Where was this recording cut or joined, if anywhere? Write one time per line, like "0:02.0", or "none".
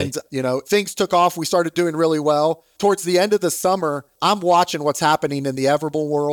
0:02.7
0:04.1